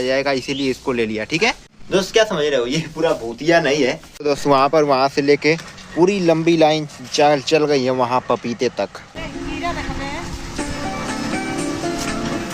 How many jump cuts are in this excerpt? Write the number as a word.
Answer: three